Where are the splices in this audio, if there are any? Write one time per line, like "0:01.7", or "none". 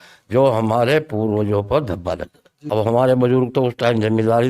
0:02.6